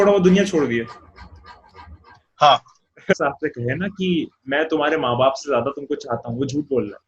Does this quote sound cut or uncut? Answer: cut